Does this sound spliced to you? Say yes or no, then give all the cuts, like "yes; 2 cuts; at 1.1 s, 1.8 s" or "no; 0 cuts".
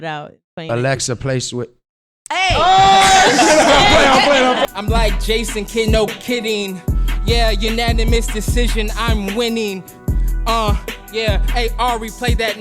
yes; 1 cut; at 4.6 s